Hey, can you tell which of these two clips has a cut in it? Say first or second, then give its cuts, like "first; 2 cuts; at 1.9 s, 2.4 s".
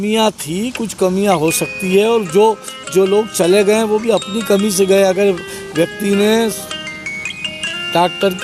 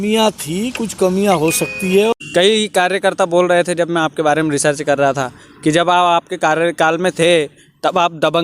second; 1 cut; at 2.1 s